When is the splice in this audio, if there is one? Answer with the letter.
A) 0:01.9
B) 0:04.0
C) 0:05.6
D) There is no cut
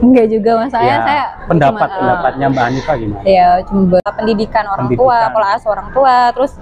B